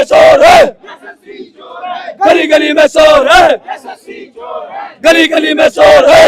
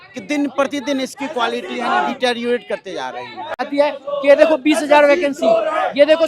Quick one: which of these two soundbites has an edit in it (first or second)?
second